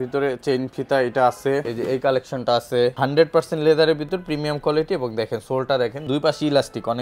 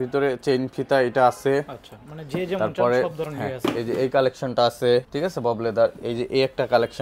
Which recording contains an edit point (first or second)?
first